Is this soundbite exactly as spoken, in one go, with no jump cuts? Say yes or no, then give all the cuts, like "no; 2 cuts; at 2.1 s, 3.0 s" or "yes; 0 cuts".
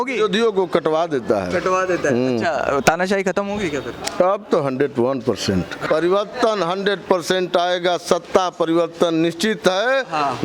no; 1 cut; at 5.8 s